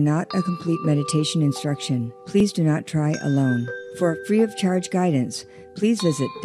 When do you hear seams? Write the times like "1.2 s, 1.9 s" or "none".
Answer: 2.4 s, 3.8 s